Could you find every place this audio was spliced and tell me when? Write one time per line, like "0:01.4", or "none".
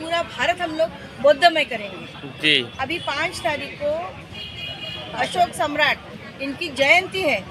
0:02.7